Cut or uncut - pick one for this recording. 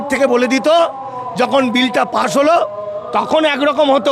uncut